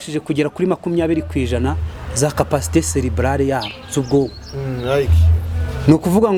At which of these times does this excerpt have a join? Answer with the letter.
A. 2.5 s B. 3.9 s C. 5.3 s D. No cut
D